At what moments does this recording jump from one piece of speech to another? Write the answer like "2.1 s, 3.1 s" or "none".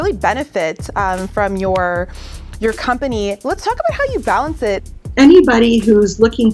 4.9 s